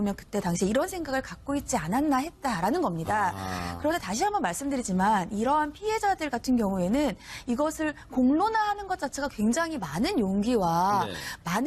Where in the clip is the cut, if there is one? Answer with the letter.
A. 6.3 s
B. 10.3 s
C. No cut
A